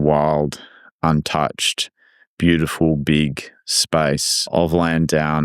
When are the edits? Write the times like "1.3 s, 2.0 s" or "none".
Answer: 4.6 s